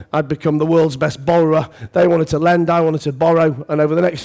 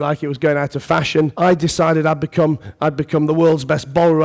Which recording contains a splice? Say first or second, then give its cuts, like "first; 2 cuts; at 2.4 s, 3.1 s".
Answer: second; 1 cut; at 1.3 s